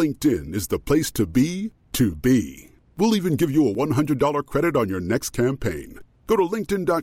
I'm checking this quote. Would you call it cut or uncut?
uncut